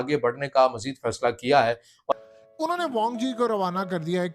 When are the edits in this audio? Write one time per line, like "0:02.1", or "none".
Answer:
0:02.1